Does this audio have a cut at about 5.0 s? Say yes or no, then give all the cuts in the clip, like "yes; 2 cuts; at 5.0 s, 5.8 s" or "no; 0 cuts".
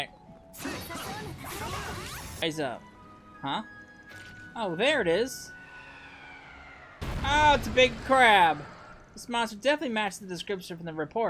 no; 1 cut; at 2.4 s